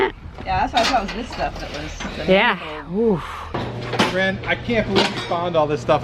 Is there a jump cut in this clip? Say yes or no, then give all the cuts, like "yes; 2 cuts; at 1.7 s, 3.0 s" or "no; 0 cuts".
yes; 1 cut; at 3.5 s